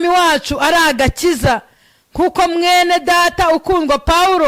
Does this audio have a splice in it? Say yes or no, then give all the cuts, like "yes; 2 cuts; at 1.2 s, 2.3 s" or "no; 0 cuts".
no; 0 cuts